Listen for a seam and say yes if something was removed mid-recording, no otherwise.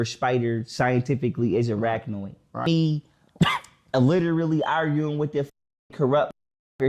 yes